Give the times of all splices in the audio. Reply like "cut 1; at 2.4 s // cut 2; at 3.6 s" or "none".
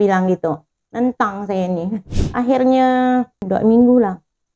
cut 1; at 2.0 s // cut 2; at 3.4 s